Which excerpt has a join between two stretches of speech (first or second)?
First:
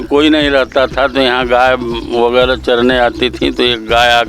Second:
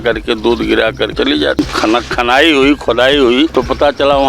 second